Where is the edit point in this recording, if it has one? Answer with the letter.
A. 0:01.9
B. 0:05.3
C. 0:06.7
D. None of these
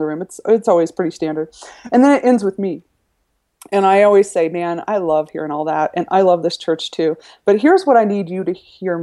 D